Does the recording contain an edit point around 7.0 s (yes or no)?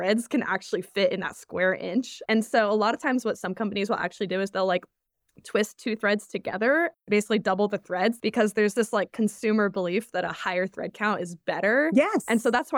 yes